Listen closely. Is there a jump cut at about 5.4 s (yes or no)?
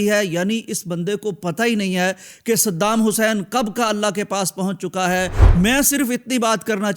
yes